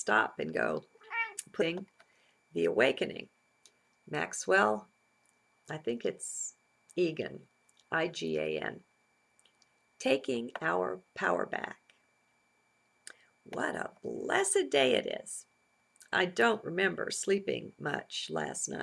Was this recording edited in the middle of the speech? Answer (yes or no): no